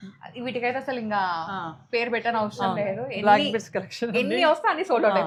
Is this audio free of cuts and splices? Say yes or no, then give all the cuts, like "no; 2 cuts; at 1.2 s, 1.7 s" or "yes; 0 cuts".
yes; 0 cuts